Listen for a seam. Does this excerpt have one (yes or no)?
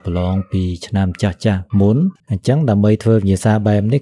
yes